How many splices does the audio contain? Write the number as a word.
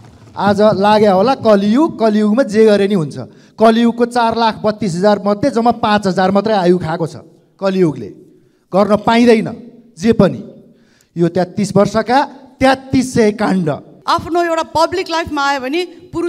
one